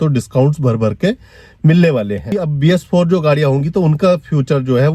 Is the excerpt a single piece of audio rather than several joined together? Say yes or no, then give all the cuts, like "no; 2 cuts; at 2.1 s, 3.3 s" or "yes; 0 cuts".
no; 1 cut; at 2.3 s